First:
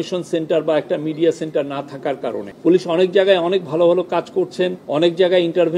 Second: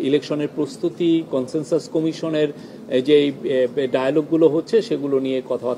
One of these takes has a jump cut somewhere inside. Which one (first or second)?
first